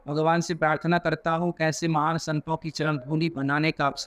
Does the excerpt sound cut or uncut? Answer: uncut